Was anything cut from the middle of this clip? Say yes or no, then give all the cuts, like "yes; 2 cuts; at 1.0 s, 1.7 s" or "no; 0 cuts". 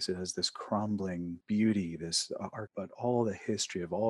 yes; 1 cut; at 2.6 s